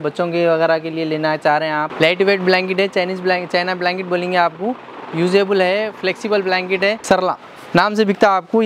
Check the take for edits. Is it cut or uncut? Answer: cut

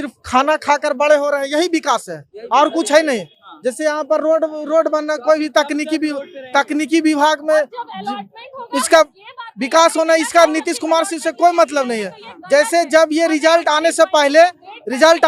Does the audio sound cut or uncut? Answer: uncut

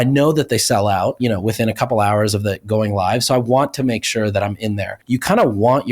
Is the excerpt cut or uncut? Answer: cut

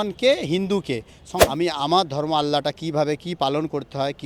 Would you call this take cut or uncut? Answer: cut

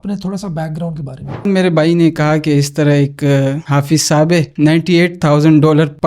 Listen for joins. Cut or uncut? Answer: cut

